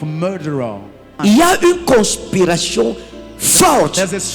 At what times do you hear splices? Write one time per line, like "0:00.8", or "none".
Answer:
0:01.1